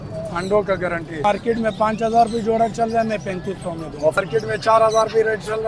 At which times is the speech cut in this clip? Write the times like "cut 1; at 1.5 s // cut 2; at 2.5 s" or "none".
cut 1; at 1.2 s // cut 2; at 4.2 s